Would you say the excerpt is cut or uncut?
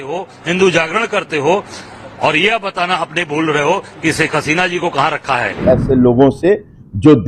cut